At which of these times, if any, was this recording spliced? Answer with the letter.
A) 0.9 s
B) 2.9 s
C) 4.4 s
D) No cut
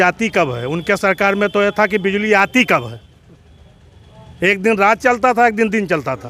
D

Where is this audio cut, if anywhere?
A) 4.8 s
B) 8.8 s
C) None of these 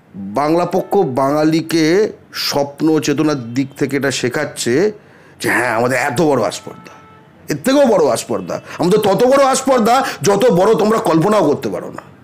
C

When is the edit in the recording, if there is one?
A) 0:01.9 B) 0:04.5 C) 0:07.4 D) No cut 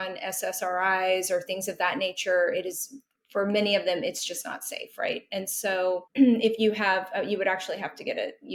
D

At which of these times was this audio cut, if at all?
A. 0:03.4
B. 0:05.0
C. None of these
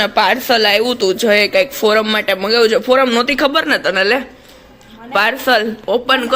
C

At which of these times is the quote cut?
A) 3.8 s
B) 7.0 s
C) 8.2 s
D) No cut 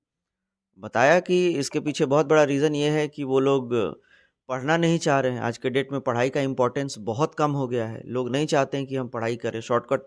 D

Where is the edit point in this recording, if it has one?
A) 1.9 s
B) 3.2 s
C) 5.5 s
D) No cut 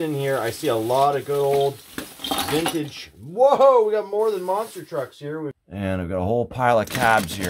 C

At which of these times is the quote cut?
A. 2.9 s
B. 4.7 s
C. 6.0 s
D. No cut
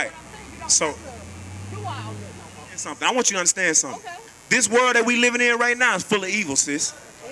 A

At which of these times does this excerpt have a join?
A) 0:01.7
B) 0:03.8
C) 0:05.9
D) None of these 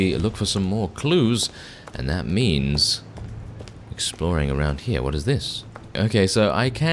C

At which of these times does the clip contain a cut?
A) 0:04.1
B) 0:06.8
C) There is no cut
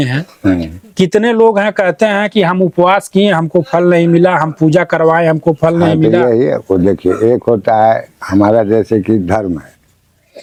C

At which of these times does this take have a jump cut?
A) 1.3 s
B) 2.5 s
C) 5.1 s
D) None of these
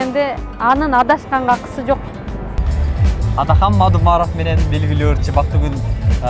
B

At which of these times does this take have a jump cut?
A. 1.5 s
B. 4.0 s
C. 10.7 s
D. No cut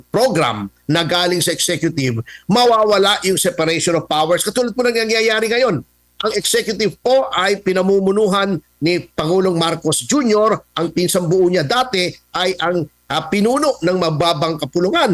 D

